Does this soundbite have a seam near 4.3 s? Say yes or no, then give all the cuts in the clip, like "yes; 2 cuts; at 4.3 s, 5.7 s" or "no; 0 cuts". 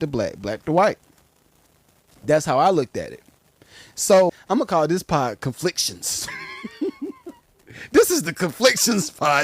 yes; 1 cut; at 4.3 s